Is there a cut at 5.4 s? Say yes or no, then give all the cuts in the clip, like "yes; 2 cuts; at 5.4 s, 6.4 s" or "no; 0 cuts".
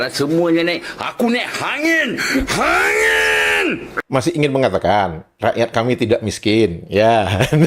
no; 1 cut; at 4.0 s